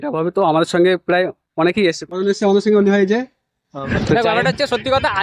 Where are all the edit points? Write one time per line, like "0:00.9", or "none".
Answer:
0:03.7